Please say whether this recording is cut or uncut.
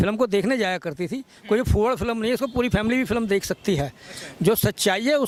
uncut